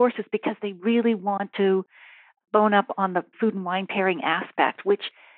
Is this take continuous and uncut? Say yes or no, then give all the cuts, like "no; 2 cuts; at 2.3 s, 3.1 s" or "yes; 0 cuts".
yes; 0 cuts